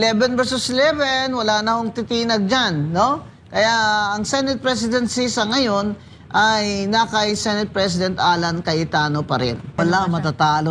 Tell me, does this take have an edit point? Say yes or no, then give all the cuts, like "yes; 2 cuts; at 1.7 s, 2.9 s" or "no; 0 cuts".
yes; 1 cut; at 9.8 s